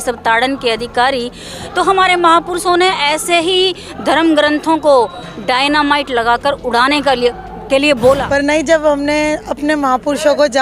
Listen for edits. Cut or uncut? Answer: cut